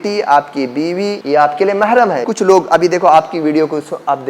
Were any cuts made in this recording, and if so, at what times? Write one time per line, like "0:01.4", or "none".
0:01.2
0:02.3